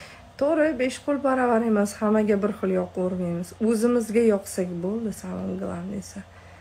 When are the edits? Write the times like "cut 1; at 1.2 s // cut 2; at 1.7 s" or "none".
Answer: none